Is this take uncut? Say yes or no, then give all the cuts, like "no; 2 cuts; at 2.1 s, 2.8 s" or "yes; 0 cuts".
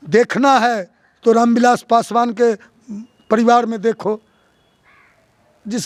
yes; 0 cuts